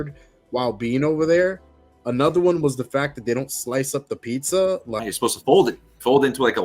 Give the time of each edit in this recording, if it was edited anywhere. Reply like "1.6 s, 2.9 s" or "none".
5.0 s